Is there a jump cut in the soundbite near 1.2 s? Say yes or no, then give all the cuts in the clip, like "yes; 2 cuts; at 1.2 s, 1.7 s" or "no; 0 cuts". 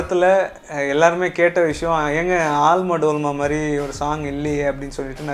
no; 0 cuts